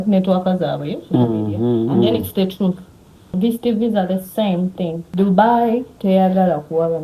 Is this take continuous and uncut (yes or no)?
no